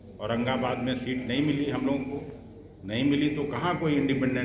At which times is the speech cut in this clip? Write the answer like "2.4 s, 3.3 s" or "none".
none